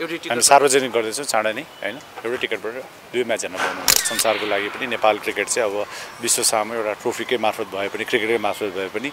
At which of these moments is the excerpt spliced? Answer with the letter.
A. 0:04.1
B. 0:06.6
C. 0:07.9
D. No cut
A